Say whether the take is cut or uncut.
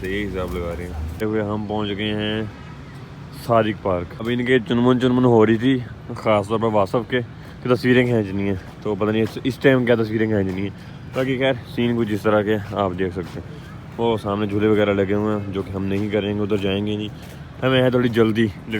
uncut